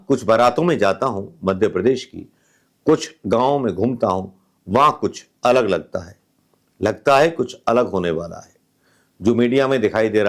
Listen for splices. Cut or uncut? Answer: uncut